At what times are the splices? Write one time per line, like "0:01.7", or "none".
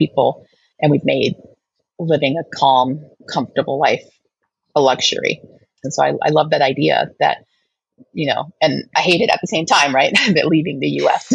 0:05.8